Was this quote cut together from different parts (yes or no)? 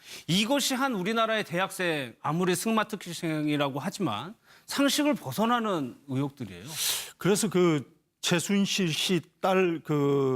yes